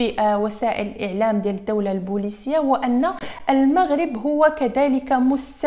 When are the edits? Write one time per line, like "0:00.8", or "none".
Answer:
none